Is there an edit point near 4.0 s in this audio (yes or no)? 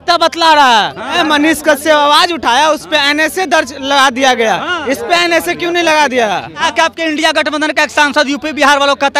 no